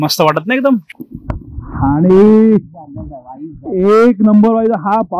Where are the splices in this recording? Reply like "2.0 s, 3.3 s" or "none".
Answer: 0.9 s